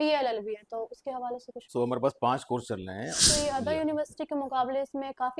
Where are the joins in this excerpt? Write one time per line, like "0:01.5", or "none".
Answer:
0:01.6
0:03.2